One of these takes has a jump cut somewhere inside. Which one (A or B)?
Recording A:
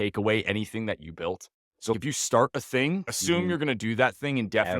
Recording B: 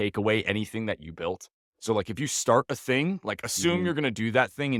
A